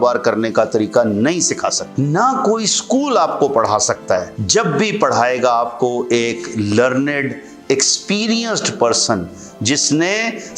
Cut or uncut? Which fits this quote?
cut